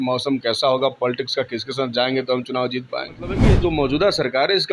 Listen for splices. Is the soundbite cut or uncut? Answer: cut